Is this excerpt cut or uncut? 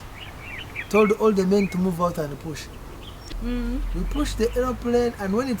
cut